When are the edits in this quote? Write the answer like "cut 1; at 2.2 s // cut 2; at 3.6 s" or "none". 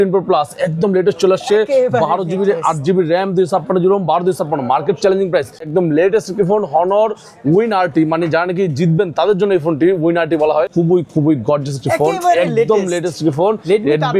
cut 1; at 5.6 s // cut 2; at 10.7 s